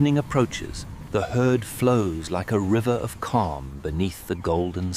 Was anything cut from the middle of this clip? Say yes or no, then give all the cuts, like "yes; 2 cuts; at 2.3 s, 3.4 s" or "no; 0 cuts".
no; 0 cuts